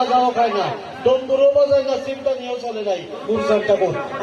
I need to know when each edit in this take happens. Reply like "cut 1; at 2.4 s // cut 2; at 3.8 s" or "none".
none